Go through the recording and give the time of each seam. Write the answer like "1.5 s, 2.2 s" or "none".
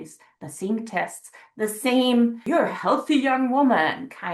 2.4 s